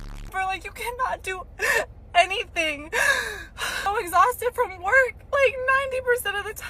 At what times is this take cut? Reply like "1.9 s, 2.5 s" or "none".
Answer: 3.9 s